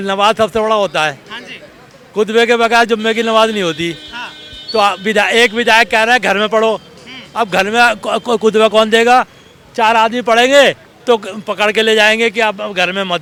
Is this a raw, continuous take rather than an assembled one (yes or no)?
yes